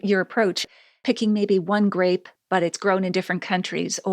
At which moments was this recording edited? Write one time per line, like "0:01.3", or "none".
0:00.9

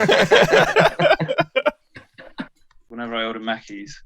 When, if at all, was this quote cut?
0:02.8

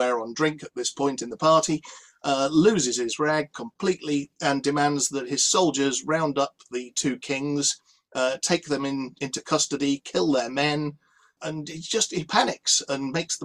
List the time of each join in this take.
none

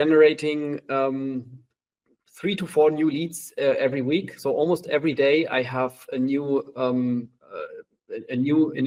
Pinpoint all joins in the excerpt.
none

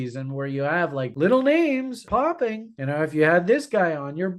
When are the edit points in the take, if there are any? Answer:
0:01.1
0:02.1

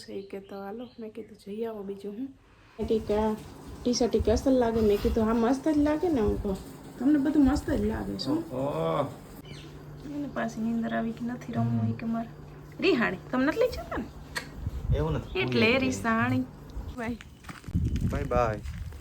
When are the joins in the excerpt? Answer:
0:02.8
0:09.3
0:17.0

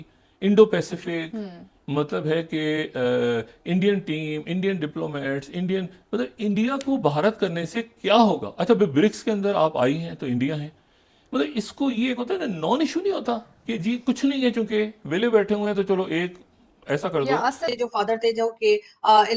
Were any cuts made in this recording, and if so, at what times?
0:17.6

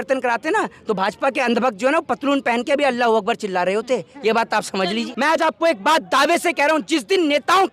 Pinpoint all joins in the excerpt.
0:05.1

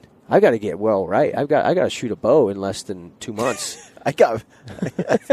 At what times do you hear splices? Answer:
none

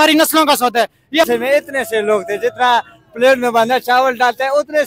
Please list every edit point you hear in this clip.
0:01.3

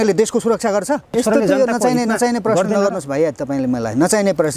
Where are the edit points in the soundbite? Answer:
0:01.2

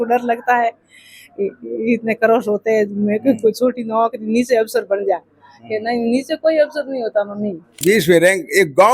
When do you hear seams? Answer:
0:07.8

